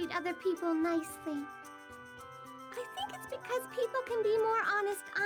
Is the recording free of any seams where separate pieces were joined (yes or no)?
yes